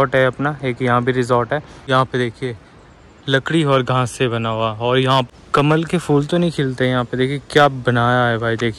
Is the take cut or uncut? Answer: cut